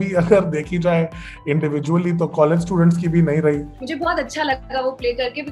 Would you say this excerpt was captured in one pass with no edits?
no; 1 cut; at 3.8 s

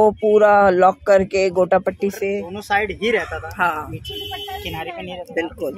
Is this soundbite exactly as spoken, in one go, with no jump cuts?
no; 1 cut; at 2.2 s

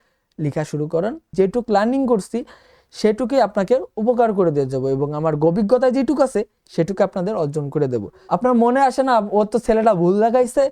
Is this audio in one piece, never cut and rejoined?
no; 2 cuts; at 1.3 s, 8.1 s

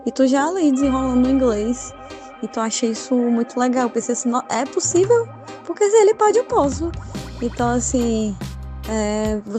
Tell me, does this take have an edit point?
no; 0 cuts

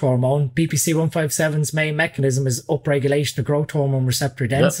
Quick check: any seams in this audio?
no; 0 cuts

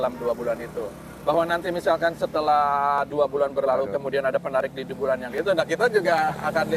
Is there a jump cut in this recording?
no; 0 cuts

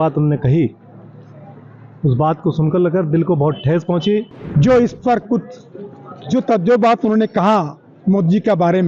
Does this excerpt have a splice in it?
yes; 1 cut; at 4.4 s

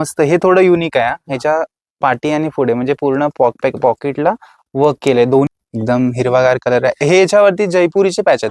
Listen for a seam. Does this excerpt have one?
yes; 1 cut; at 5.5 s

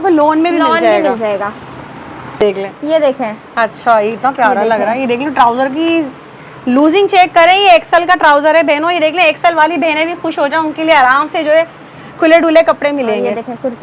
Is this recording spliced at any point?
yes; 1 cut; at 2.4 s

